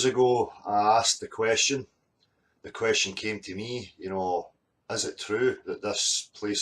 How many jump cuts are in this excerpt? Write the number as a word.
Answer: one